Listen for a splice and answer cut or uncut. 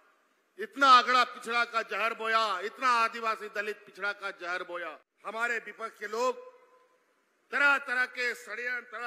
cut